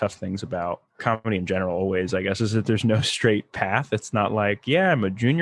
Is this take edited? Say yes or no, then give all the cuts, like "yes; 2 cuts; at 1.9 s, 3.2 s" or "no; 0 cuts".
yes; 1 cut; at 1.0 s